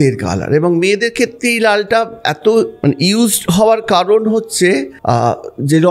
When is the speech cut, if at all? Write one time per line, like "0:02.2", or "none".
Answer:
0:02.7
0:04.9

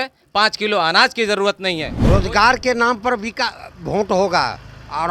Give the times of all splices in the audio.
0:01.9

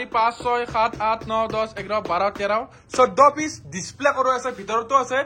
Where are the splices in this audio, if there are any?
none

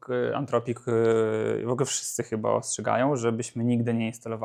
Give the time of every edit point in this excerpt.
none

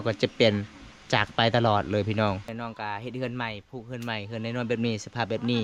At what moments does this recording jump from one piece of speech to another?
0:02.5

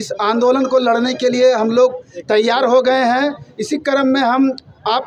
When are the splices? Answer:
none

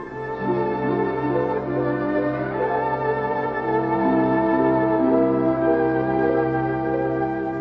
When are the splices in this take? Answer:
0:04.6

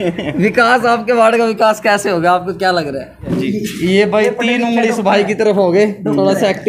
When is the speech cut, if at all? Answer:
0:03.3

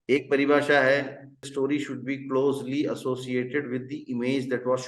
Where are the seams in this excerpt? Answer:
0:01.4

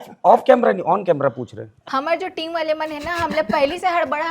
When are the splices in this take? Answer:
0:01.8

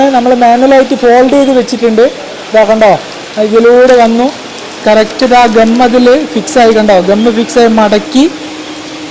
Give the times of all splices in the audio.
none

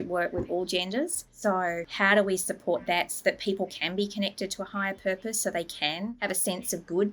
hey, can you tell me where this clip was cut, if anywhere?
0:01.6
0:06.2

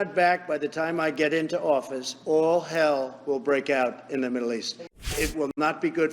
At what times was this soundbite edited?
0:05.1

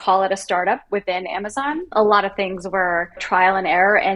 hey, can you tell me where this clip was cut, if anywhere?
0:01.9
0:03.2

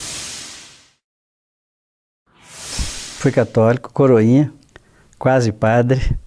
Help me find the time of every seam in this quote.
none

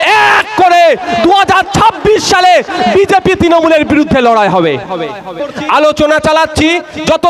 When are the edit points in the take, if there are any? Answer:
0:05.5

